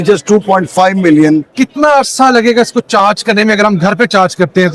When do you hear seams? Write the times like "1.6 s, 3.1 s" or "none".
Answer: 1.5 s